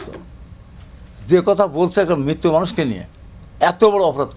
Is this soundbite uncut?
yes; 0 cuts

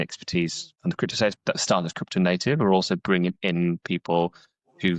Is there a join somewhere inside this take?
yes; 1 cut; at 1.4 s

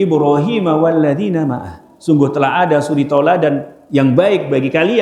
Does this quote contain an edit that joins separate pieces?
yes; 1 cut; at 3.7 s

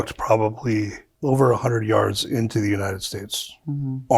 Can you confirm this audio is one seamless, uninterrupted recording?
no; 1 cut; at 1.0 s

